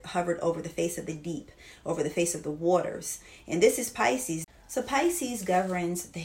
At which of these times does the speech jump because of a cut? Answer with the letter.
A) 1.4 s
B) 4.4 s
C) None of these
B